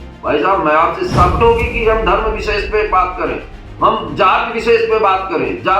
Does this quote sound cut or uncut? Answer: cut